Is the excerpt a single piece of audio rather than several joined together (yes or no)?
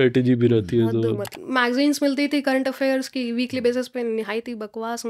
no